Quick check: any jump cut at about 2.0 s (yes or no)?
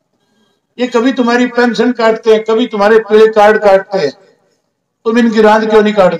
no